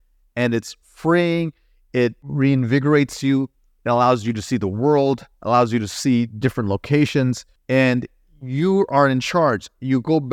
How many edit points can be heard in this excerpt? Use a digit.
2